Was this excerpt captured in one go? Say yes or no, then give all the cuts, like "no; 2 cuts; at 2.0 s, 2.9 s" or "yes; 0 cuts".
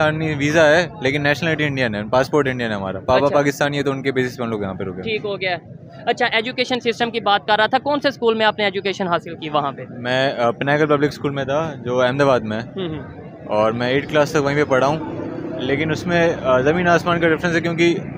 yes; 0 cuts